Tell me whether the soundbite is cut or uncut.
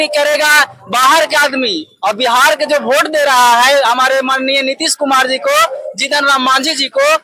uncut